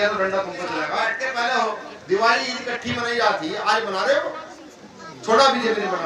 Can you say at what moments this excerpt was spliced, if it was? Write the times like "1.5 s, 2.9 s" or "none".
1.2 s